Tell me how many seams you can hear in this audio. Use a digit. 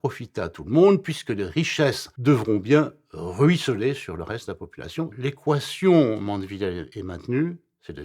3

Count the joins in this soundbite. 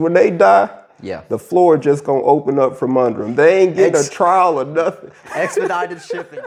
0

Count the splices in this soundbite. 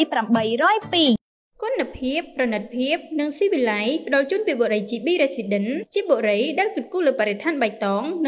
1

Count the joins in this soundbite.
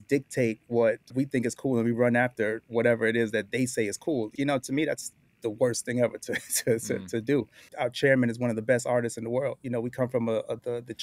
3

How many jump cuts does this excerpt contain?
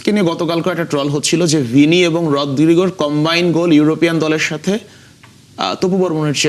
0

